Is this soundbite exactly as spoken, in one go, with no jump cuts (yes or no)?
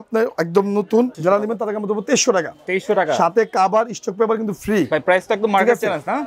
no